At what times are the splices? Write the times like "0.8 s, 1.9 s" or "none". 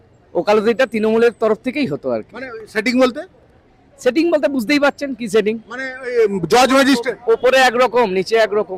none